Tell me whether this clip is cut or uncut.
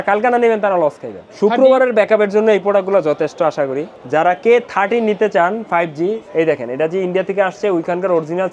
cut